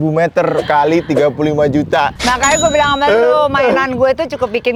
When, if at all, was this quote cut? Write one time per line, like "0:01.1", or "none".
none